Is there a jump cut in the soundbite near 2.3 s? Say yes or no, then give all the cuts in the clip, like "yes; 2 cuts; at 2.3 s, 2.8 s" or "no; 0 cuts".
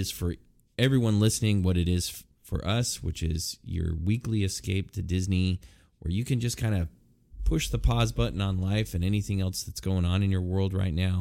no; 0 cuts